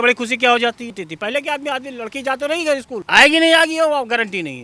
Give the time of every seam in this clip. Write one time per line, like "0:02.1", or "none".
0:01.0
0:03.0